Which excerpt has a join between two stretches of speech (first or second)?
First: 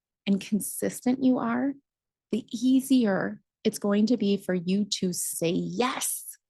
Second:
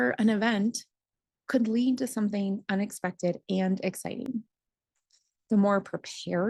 first